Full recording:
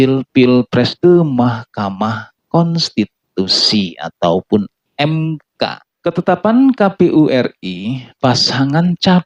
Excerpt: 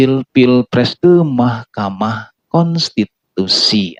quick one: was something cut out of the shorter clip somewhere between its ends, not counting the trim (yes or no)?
no